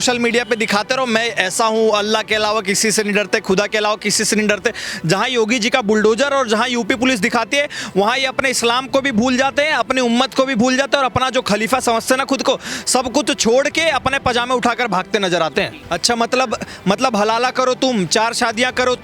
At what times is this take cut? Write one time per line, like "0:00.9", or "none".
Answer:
0:15.8

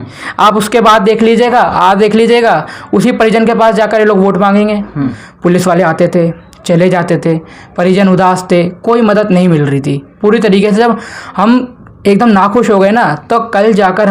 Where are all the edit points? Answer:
0:05.2

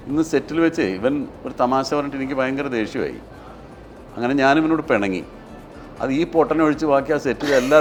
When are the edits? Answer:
none

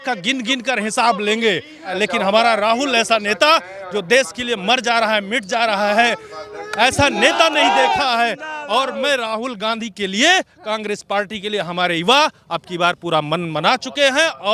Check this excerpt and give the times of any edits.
0:01.9

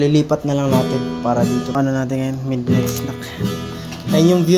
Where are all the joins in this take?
0:01.8

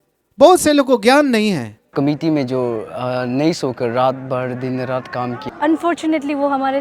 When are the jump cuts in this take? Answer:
0:01.9
0:05.5

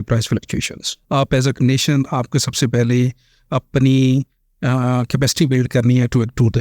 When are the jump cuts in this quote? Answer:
0:00.9

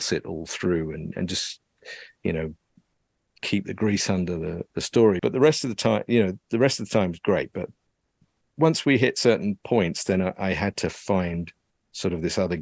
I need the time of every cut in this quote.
0:05.2

